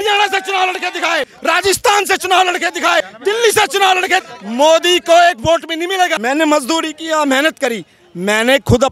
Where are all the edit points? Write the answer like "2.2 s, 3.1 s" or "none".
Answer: 1.3 s, 3.1 s, 4.3 s, 6.2 s